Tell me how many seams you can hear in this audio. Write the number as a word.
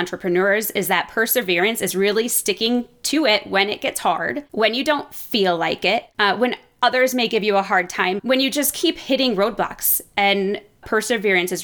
four